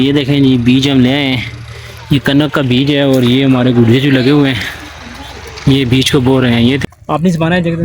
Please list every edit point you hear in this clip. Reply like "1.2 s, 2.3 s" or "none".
6.8 s